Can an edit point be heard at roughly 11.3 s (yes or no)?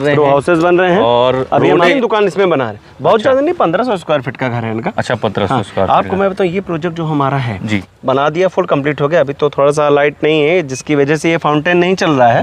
no